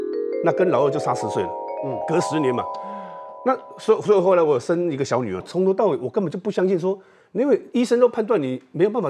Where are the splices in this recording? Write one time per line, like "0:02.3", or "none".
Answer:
0:05.5